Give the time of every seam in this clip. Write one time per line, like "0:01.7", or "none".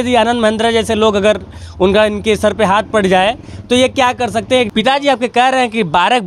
0:04.7